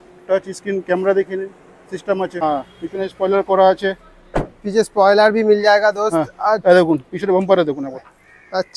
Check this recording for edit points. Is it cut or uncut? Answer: cut